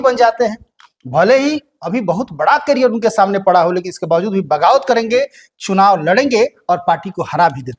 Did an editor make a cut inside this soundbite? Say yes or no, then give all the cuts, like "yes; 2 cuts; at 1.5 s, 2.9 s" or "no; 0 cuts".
no; 0 cuts